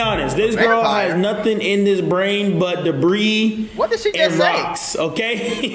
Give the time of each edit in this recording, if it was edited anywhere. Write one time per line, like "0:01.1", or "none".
none